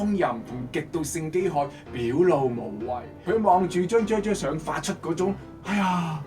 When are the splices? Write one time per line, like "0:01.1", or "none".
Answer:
0:03.1